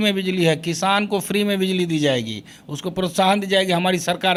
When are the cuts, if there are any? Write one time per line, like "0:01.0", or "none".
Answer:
none